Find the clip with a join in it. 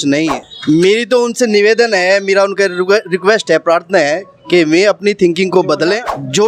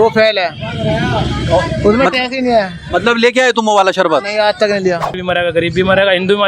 second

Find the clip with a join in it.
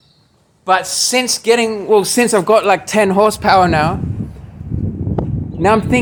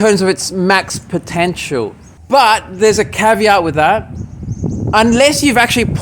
second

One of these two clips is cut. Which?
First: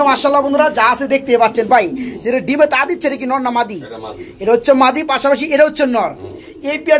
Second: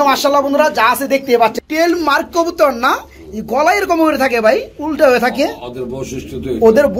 second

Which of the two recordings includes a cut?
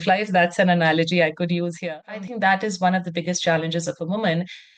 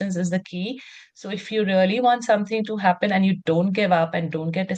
first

